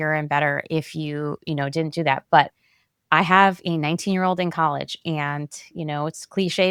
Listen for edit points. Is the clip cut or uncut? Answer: uncut